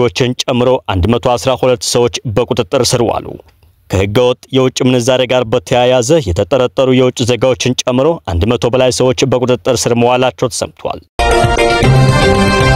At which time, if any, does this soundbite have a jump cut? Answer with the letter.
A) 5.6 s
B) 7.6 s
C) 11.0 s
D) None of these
C